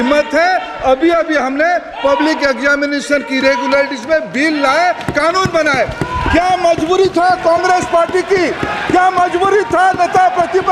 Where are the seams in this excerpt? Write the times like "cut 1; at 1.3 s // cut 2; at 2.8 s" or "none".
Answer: none